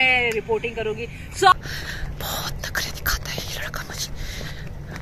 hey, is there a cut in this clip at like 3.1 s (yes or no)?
no